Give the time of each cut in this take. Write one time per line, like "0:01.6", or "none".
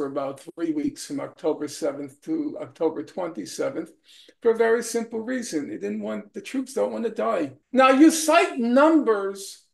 0:07.6